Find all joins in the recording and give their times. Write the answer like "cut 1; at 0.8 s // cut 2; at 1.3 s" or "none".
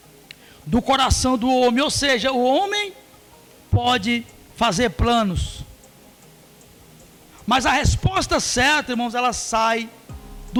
none

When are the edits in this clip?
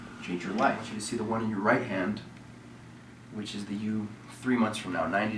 cut 1; at 0.9 s

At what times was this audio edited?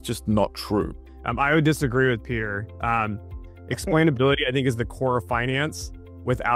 cut 1; at 1.0 s

